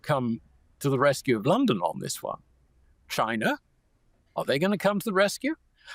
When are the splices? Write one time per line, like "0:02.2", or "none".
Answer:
none